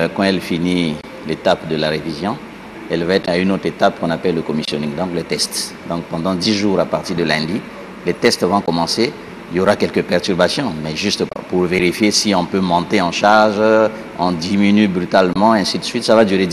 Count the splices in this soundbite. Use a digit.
0